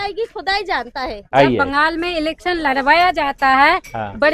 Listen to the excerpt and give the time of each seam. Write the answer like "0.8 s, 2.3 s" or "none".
1.2 s